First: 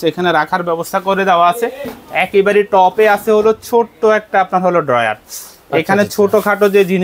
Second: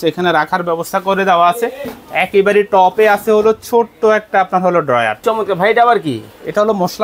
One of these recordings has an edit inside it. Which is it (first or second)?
second